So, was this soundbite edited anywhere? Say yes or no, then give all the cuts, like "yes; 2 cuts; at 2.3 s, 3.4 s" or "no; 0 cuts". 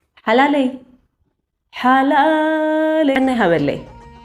yes; 1 cut; at 3.1 s